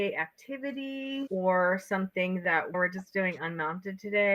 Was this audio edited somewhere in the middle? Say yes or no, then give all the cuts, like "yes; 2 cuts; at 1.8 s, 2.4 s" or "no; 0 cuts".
no; 0 cuts